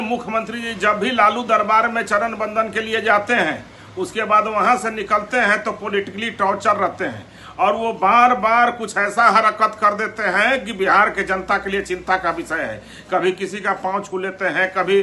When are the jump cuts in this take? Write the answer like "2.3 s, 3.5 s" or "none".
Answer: none